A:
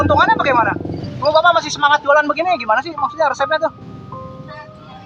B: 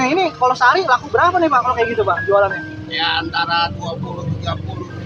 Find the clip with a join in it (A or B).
A